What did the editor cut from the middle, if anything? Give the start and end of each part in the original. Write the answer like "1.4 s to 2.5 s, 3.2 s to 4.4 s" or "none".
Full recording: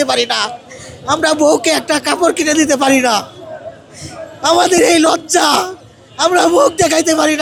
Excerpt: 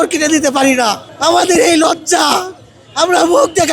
3.3 s to 4.3 s